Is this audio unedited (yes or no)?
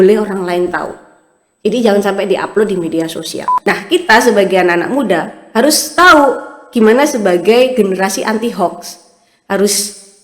no